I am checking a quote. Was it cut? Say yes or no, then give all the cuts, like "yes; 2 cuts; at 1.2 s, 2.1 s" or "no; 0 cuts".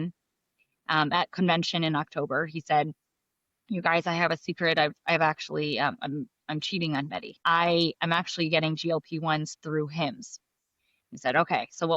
yes; 1 cut; at 7.4 s